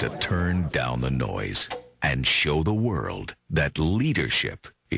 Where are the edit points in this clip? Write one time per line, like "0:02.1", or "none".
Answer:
0:01.9